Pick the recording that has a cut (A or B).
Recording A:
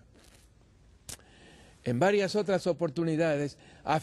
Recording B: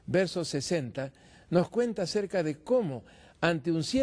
A